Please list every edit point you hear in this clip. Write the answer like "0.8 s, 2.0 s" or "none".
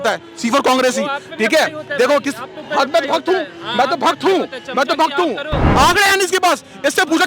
5.6 s

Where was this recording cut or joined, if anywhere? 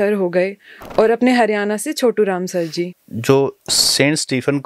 2.9 s

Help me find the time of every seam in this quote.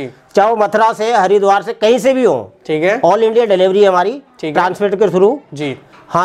none

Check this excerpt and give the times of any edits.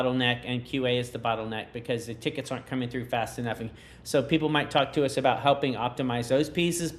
none

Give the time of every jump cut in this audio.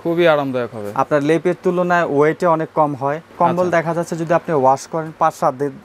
3.3 s

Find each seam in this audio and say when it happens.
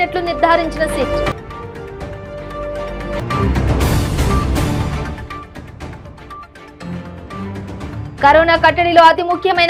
none

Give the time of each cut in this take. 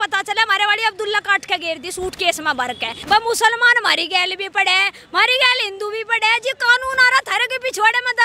2.9 s

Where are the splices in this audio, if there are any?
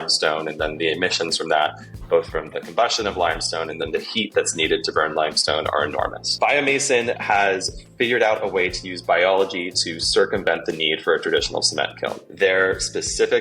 6.2 s, 12.2 s

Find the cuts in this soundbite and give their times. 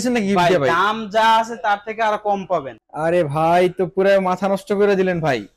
2.8 s

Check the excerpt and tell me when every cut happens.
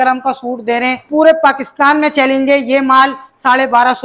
1.0 s

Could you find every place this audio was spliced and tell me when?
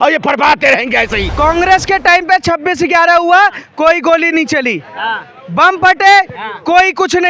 1.3 s

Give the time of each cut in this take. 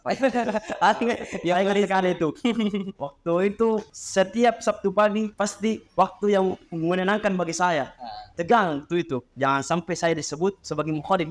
none

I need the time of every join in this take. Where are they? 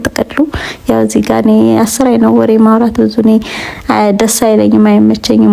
none

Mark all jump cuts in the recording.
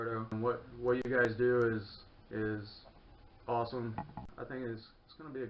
4.2 s

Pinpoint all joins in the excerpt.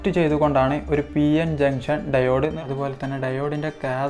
2.6 s

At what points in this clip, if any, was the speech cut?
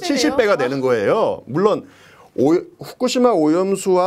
none

